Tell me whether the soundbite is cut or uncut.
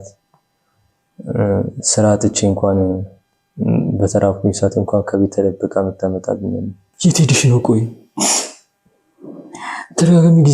cut